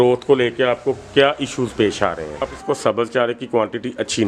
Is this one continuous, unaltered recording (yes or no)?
no